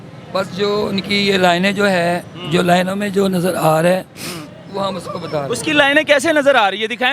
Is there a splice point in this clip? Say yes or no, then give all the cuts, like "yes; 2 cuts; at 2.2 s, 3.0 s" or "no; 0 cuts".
no; 0 cuts